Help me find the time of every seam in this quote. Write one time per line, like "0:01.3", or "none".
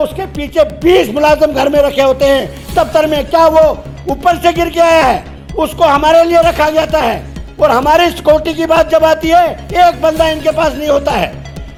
none